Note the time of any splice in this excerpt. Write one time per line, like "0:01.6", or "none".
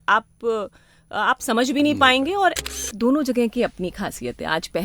0:02.6